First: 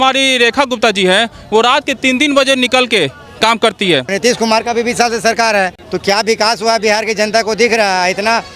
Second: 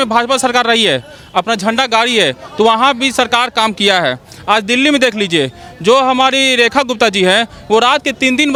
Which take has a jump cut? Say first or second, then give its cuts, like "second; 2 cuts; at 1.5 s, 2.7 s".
first; 2 cuts; at 4.1 s, 5.8 s